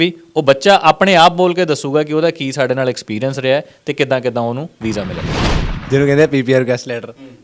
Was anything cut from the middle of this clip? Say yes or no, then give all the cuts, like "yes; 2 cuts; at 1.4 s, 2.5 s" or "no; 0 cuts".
yes; 1 cut; at 5.7 s